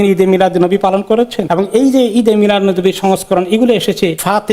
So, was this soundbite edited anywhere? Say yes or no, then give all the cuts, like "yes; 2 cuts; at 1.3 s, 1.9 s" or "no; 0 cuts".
yes; 1 cut; at 1.4 s